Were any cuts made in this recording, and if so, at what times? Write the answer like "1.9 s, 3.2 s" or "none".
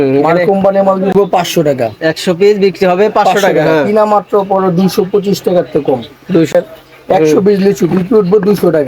1.1 s, 6.5 s